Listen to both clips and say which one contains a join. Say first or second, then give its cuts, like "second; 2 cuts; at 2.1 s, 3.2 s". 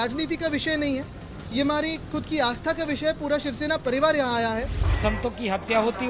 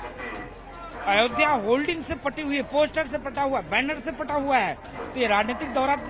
first; 1 cut; at 4.8 s